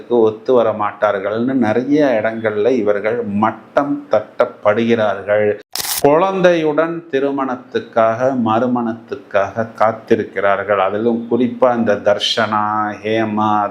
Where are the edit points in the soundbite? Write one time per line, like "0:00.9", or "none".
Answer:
0:05.7